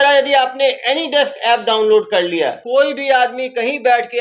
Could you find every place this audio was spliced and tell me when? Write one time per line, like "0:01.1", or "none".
0:02.6

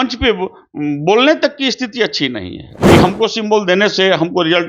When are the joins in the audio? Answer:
0:02.7

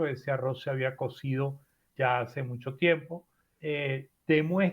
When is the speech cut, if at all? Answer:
none

